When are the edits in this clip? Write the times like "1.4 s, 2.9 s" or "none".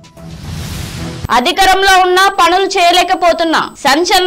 1.3 s